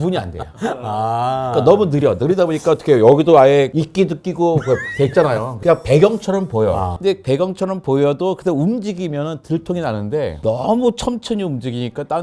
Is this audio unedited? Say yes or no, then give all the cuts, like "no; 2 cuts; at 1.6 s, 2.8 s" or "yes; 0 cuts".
yes; 0 cuts